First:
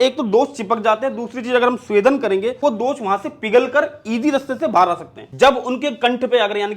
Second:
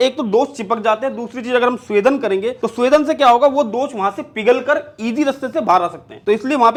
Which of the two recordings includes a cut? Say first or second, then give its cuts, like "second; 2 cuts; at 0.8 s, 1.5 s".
first; 2 cuts; at 2.6 s, 5.3 s